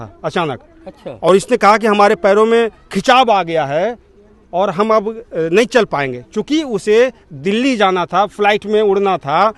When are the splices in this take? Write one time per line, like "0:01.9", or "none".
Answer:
none